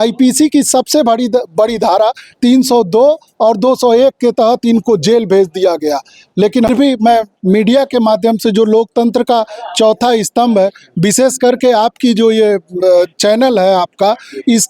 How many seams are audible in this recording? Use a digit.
1